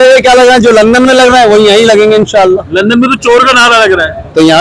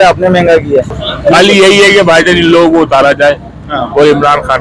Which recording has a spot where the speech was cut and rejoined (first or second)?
second